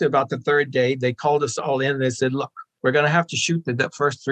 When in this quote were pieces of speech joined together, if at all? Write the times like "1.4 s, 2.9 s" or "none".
none